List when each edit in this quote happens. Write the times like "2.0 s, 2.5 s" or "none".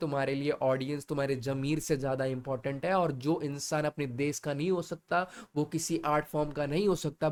none